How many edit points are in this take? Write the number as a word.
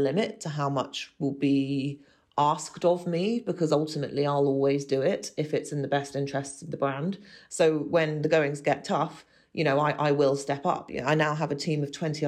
two